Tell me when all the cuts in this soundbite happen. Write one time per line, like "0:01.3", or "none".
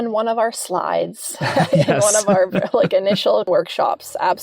0:03.5